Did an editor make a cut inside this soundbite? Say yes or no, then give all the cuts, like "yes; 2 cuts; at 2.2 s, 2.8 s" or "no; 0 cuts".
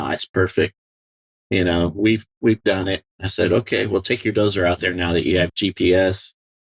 yes; 1 cut; at 5.5 s